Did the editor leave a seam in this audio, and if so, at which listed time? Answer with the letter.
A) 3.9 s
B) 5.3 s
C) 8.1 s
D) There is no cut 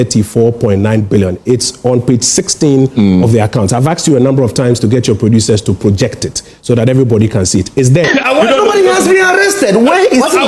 C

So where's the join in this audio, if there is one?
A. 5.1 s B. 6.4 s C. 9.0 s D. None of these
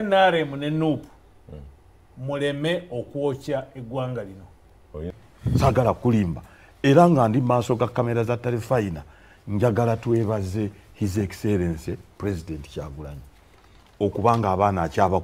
A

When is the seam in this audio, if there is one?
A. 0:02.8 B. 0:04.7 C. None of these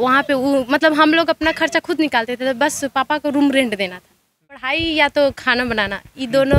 B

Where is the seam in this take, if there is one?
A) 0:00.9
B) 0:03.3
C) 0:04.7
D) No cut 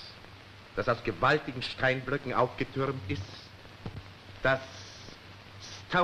C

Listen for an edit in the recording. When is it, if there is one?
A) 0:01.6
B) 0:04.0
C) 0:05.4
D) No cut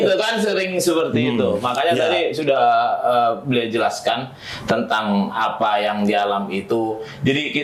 D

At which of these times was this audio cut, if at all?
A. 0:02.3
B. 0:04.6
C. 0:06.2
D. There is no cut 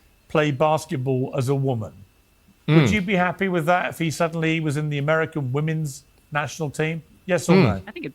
D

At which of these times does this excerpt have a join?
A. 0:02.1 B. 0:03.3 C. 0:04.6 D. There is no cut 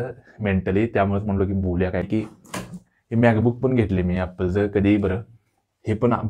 A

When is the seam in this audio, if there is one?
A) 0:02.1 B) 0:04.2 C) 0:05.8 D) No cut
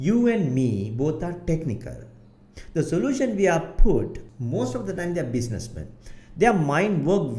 B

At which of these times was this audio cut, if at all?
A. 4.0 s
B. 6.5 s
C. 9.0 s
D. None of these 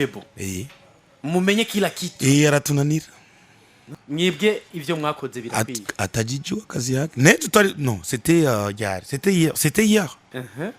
A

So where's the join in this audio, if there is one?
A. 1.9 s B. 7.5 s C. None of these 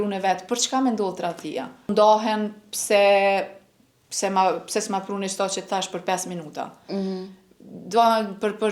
A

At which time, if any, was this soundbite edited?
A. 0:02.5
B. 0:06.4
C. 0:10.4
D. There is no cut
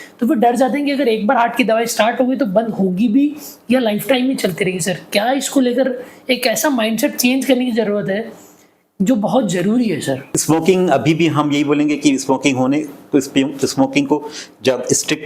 C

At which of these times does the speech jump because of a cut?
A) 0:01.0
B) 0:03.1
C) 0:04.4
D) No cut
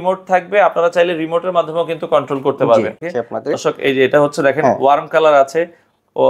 B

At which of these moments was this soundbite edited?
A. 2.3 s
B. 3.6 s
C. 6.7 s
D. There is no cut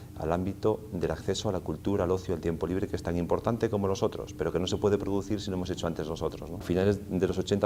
C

